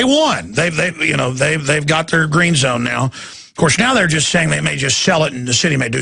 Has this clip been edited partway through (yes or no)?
no